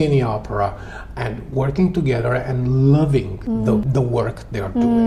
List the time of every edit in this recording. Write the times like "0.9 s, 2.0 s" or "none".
3.3 s

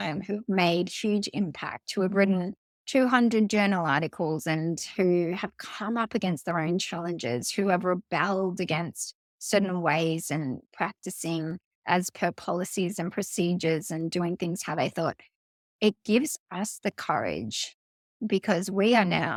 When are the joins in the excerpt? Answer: none

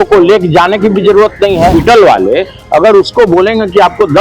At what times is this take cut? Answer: 1.7 s

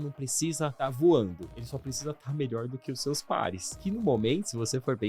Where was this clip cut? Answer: 0.7 s, 1.5 s, 3.7 s

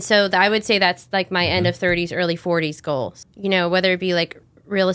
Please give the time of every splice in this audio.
3.2 s

